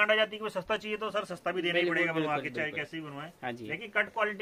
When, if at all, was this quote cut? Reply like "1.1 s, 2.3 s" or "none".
none